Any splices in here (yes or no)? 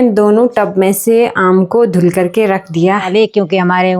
yes